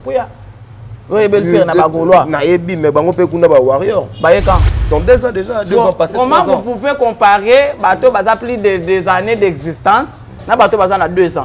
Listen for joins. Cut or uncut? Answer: cut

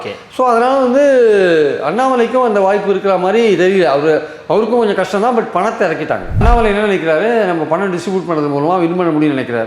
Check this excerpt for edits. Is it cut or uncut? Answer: cut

